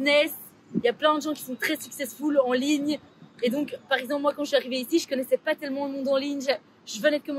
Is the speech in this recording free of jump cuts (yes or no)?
yes